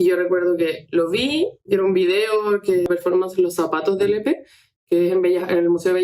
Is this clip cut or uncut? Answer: cut